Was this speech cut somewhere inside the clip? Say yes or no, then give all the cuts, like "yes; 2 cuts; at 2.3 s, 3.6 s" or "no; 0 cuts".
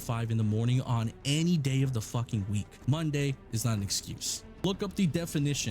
yes; 2 cuts; at 2.7 s, 4.6 s